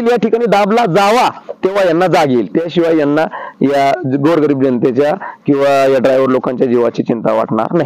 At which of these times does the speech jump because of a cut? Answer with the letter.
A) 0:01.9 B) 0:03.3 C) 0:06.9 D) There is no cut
D